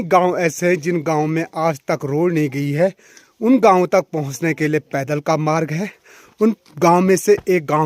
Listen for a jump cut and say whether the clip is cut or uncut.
uncut